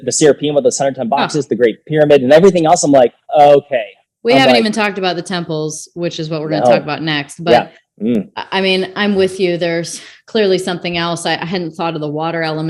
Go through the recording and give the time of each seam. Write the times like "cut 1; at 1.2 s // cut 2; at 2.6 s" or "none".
none